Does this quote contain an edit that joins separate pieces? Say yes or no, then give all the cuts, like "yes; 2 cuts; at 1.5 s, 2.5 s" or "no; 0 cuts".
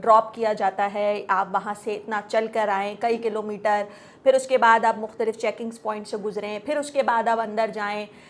no; 0 cuts